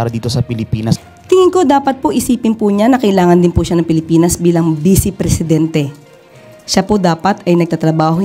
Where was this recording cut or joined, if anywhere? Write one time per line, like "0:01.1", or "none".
0:01.0